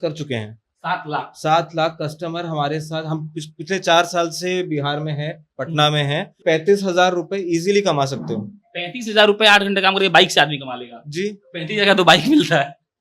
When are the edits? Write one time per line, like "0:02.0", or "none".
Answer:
0:06.3